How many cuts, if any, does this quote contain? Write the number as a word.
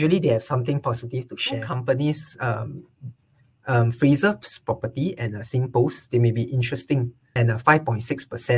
two